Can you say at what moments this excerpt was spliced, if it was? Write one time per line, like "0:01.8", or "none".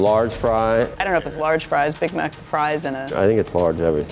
0:01.0
0:03.1